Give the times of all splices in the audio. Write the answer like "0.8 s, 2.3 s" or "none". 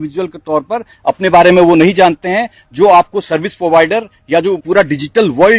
4.6 s